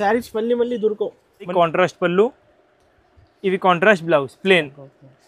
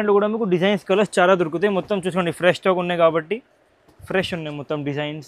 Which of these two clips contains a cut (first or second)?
first